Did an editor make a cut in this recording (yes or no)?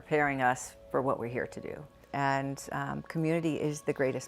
yes